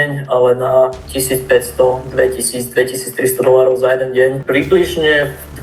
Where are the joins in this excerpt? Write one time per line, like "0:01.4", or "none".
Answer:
0:04.4